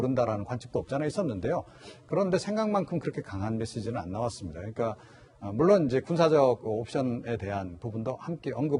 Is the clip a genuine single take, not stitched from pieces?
no; 1 cut; at 5.9 s

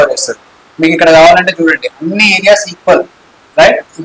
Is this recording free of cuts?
yes; 0 cuts

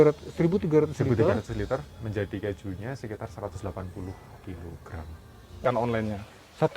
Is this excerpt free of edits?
no; 1 cut; at 5.6 s

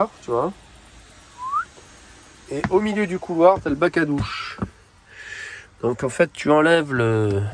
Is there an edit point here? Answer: no; 0 cuts

